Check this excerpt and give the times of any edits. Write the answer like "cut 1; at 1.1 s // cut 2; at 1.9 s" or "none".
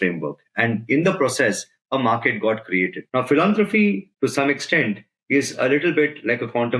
cut 1; at 3.0 s